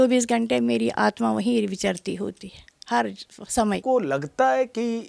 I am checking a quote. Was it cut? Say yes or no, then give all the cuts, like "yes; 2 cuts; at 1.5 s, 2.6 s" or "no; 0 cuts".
yes; 1 cut; at 3.8 s